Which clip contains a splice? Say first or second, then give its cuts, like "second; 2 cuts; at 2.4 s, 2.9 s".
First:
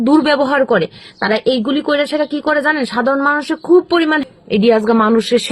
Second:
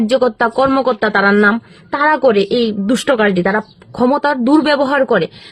first; 1 cut; at 4.2 s